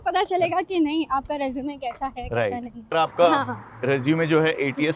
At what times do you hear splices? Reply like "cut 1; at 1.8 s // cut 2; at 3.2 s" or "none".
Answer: cut 1; at 2.8 s